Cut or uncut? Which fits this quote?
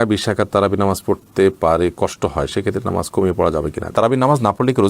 cut